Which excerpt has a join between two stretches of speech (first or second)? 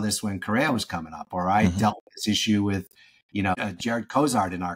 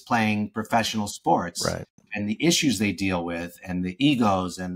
first